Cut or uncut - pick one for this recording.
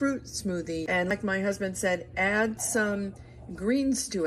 cut